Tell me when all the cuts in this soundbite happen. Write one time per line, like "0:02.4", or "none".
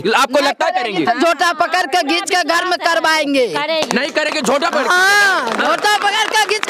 none